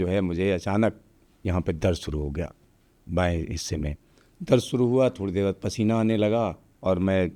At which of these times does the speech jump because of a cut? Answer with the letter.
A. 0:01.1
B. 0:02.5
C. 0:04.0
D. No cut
D